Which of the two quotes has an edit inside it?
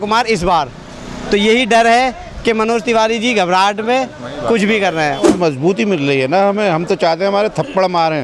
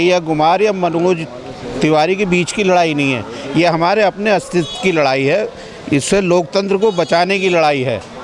first; 1 cut; at 5.3 s

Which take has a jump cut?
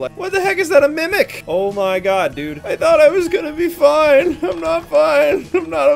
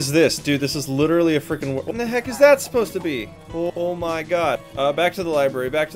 second; 3 cuts; at 1.8 s, 3.7 s, 4.6 s

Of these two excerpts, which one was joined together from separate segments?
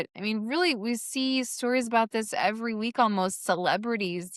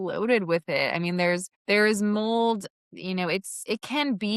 second; 2 cuts; at 1.5 s, 3.5 s

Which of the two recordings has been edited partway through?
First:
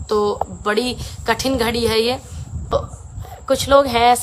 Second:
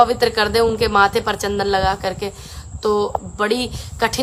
first; 1 cut; at 2.7 s

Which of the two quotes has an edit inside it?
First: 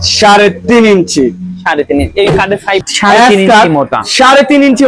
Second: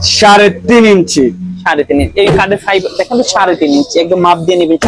first; 1 cut; at 2.9 s

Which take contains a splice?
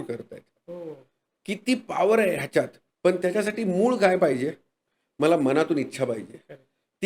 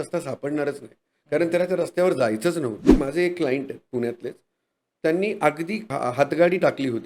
second; 2 cuts; at 2.9 s, 5.9 s

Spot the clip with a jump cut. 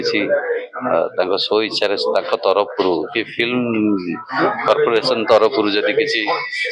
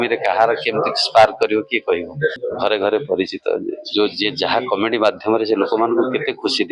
second; 1 cut; at 2.4 s

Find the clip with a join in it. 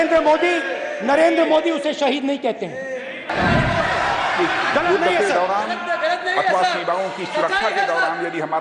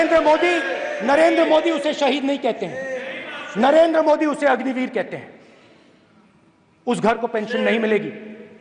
first; 1 cut; at 3.3 s

